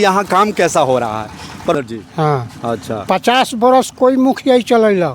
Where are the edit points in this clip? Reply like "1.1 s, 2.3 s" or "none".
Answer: 1.7 s